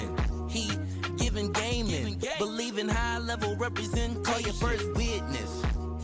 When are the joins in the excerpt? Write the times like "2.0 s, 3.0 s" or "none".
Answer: none